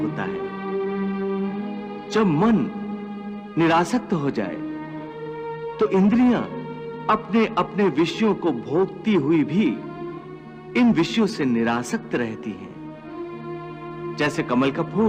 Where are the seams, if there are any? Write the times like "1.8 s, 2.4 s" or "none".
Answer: none